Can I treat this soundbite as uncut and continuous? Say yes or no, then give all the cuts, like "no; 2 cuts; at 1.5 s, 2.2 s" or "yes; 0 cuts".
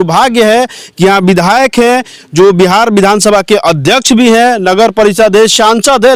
yes; 0 cuts